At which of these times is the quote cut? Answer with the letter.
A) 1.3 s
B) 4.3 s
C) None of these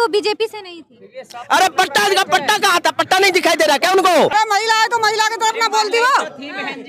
B